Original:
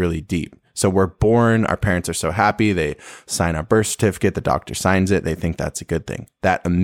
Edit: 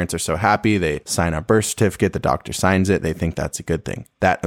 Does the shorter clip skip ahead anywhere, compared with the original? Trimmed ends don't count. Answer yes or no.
yes